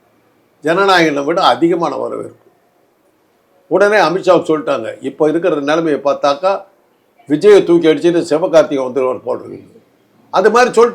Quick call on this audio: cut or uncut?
uncut